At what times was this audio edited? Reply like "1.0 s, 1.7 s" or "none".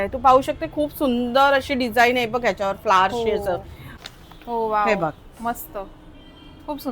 3.9 s